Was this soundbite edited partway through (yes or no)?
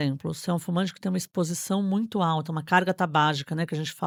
no